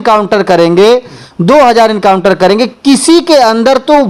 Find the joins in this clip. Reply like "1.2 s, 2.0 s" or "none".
none

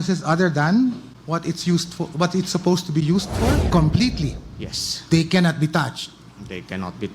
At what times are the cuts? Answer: 1.1 s, 3.7 s

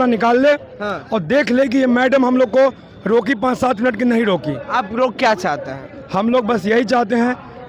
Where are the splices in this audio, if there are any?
none

